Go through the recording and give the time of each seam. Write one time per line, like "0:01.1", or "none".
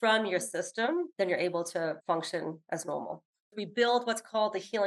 0:01.1
0:02.1
0:03.6